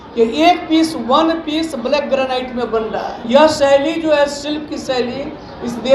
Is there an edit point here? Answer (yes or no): yes